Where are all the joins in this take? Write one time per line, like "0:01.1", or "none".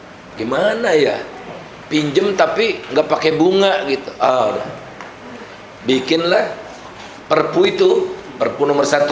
none